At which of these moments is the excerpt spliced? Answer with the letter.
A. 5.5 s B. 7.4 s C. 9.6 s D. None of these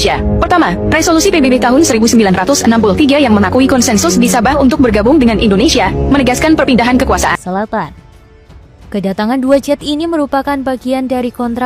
B